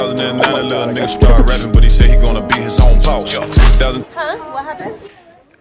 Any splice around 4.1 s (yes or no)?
yes